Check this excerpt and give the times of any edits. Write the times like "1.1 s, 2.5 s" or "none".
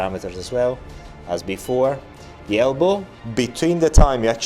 3.2 s